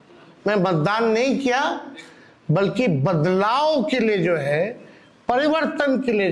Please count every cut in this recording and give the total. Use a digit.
0